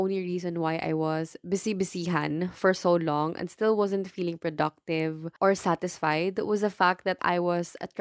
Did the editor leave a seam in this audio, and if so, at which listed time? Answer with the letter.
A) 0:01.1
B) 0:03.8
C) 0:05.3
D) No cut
C